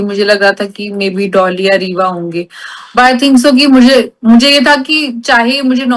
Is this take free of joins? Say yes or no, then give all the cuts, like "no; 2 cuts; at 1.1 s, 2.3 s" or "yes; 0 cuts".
yes; 0 cuts